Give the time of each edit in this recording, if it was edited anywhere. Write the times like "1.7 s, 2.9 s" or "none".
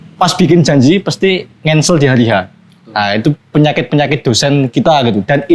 none